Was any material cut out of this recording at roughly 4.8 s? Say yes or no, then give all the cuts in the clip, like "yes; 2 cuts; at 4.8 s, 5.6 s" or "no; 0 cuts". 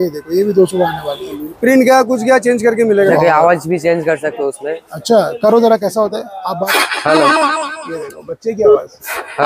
no; 3 cuts; at 1.7 s, 3.1 s, 6.6 s